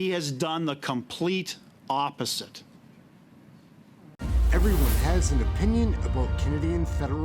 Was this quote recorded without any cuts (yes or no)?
no